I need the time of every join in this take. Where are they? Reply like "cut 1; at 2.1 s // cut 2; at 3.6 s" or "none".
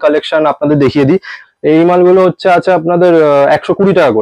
cut 1; at 1.3 s